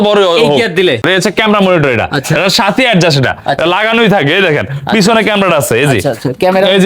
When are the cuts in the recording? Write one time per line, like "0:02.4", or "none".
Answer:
0:01.0